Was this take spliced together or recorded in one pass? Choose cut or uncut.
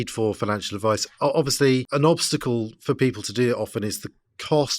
cut